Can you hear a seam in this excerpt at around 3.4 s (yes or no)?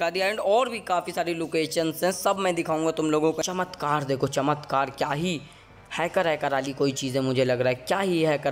yes